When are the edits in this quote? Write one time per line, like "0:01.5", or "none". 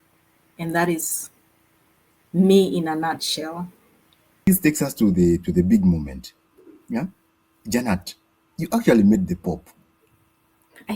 0:04.5